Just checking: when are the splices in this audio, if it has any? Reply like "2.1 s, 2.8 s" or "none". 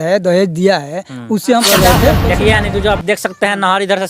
1.8 s